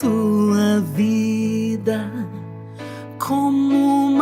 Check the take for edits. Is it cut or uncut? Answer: uncut